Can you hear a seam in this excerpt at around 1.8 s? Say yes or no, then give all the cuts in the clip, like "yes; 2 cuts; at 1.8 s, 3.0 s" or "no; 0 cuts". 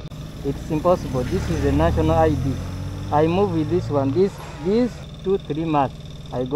no; 1 cut; at 5.1 s